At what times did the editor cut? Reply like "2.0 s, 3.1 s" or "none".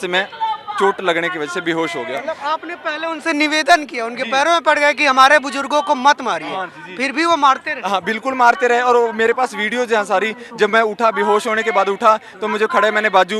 none